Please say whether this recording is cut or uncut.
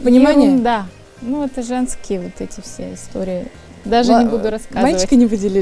uncut